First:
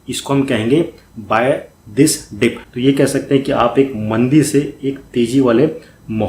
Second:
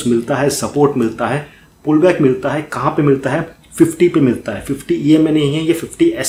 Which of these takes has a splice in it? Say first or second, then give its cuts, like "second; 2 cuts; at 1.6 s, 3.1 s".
first; 1 cut; at 2.6 s